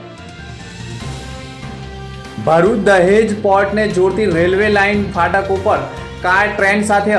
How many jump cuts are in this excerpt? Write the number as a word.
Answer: zero